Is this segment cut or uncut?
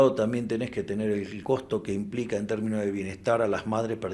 cut